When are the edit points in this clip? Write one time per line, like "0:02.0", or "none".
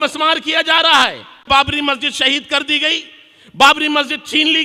0:01.5